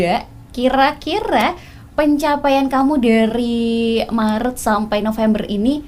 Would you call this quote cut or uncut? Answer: uncut